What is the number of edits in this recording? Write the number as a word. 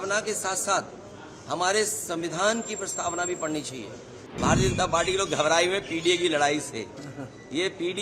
one